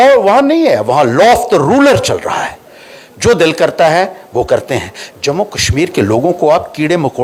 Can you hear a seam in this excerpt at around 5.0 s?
no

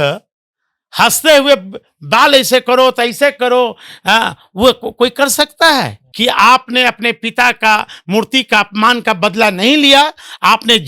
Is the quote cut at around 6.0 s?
yes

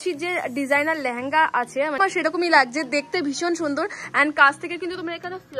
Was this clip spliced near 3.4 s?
no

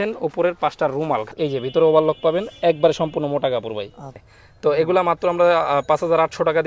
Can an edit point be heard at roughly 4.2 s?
yes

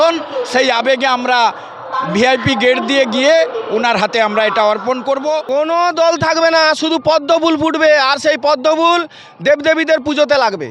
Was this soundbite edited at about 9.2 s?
no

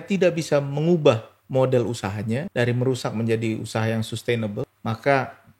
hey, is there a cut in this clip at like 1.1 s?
no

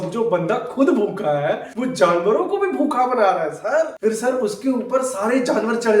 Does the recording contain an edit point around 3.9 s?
yes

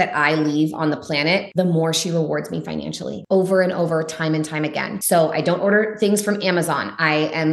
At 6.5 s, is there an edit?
no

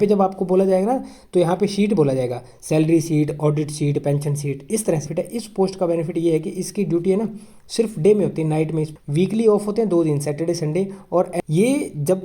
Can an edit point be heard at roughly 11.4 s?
yes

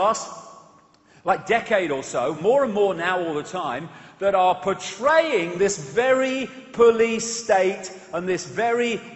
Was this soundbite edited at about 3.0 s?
yes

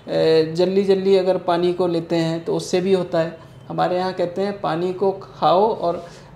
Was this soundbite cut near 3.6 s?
no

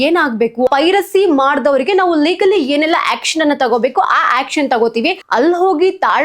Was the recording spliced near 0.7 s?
yes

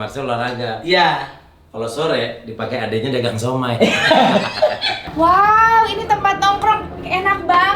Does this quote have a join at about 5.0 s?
yes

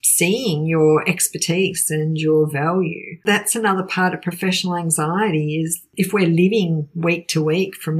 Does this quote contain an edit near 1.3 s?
no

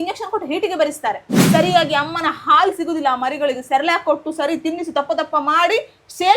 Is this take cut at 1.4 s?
yes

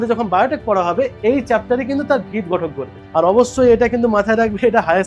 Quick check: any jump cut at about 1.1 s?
no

